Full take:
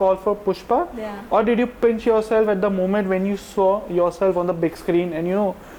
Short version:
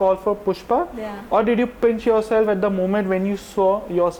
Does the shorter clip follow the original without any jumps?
yes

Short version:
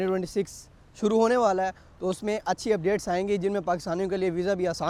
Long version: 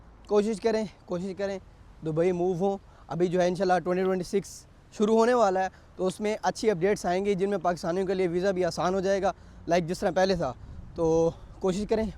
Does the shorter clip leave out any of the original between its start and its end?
no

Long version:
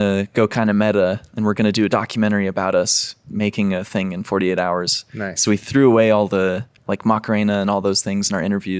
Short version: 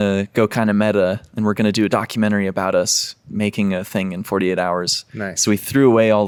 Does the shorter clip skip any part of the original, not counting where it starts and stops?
no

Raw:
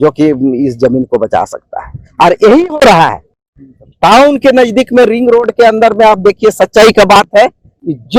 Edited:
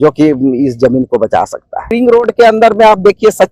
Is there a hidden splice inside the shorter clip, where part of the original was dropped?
yes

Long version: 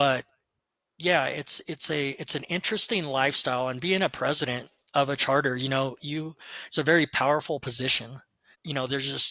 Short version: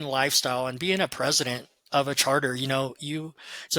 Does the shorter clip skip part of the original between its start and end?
no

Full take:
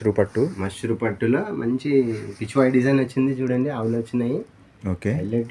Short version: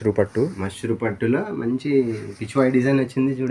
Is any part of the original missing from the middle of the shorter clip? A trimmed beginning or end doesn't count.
no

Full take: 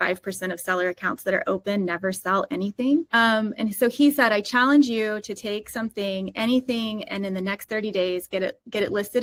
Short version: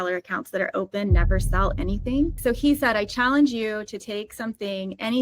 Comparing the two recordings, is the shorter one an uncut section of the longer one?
no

